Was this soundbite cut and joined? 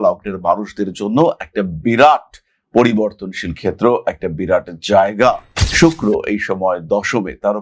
yes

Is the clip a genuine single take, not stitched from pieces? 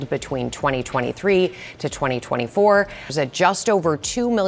no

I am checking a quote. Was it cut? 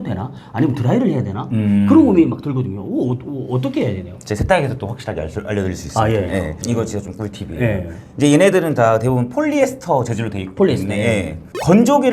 no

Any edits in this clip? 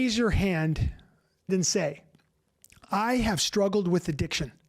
yes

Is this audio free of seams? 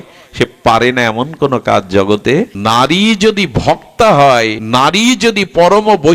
no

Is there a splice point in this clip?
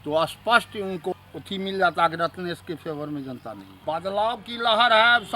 yes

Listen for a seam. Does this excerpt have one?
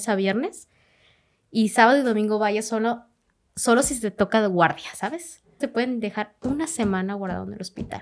yes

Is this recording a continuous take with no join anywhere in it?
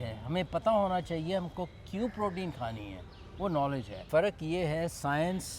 no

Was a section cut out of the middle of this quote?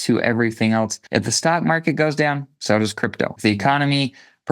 yes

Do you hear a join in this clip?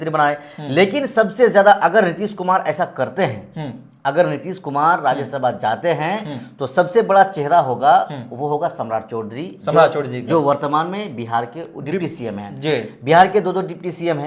no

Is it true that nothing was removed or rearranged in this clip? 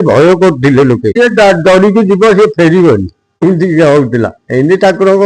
no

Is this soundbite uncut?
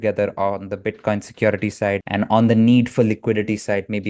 no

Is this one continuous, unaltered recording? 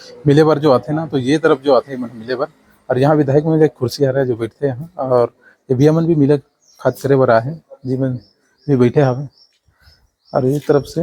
yes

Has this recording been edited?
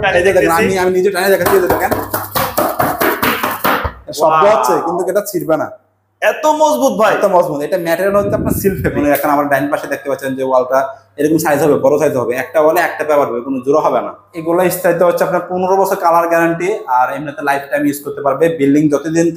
yes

